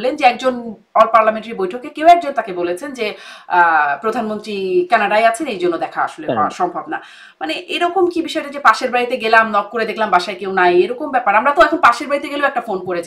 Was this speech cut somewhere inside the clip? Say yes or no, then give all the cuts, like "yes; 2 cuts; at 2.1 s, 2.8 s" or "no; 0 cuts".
no; 0 cuts